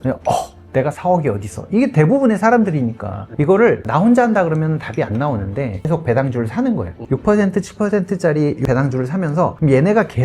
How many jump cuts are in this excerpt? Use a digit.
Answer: 2